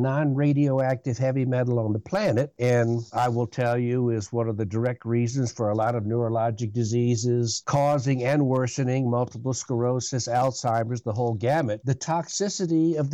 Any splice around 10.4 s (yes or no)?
no